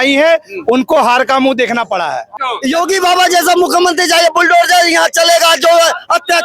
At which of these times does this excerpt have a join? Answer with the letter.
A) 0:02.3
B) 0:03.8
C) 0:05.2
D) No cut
A